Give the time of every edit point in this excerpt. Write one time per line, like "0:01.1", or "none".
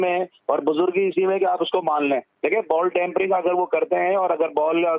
0:02.3